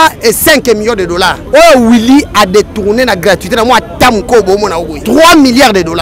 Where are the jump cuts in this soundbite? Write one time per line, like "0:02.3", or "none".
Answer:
0:01.4
0:05.0